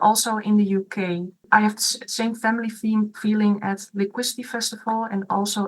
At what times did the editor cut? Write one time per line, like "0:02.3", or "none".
0:01.4